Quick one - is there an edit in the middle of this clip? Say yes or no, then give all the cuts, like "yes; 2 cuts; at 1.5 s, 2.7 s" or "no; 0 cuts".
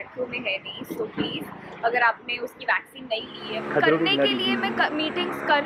yes; 1 cut; at 3.4 s